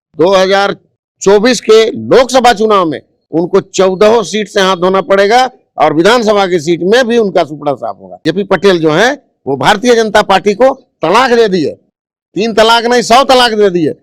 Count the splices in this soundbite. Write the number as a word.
one